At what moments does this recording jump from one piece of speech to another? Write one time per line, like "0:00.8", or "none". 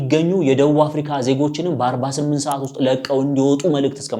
none